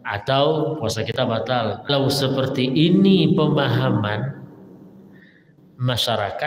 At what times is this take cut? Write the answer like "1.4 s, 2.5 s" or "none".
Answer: 1.9 s